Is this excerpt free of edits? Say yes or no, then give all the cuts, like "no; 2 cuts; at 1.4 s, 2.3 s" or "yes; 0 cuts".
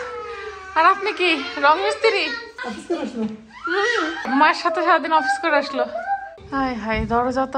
no; 3 cuts; at 2.5 s, 4.3 s, 6.3 s